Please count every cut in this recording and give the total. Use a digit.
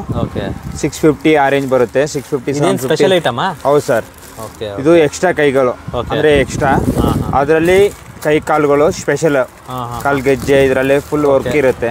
0